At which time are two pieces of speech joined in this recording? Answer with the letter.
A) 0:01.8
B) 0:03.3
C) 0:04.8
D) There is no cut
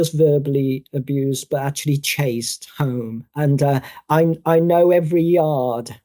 B